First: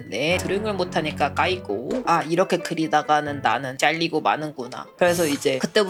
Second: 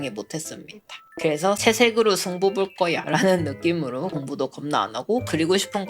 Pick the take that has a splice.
second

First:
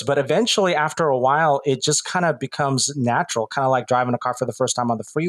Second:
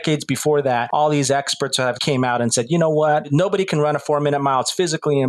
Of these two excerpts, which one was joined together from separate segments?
second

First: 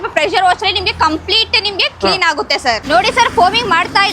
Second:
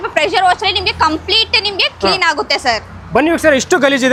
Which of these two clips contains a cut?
first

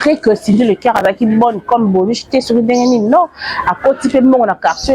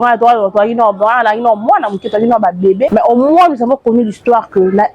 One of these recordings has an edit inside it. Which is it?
second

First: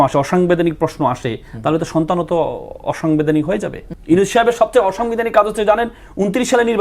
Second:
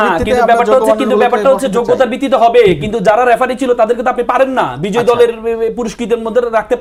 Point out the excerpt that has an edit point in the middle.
first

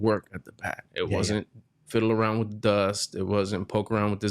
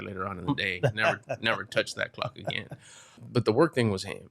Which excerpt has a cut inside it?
second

